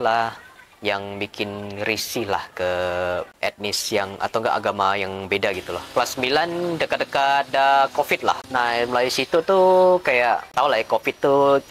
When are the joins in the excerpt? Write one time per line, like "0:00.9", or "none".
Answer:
0:03.3
0:05.8
0:08.4
0:10.5

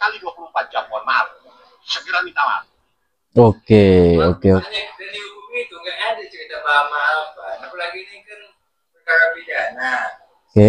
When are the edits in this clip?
0:04.6

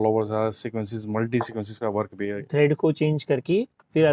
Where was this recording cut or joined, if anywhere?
0:02.4

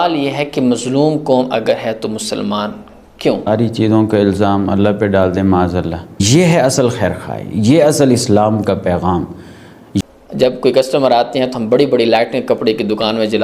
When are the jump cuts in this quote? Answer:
0:03.5
0:06.2
0:10.0

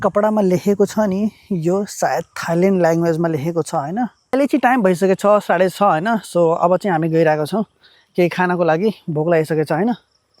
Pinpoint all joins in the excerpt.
0:04.2

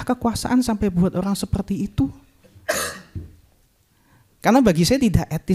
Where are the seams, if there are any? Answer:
none

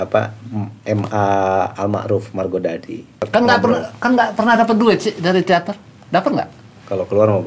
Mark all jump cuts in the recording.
0:03.1

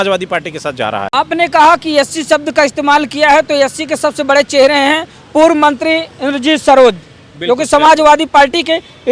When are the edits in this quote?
none

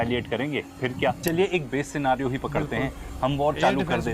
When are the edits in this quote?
none

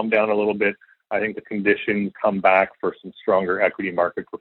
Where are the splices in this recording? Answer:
0:02.1
0:02.7

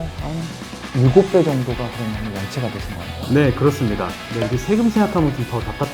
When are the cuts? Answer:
0:04.2

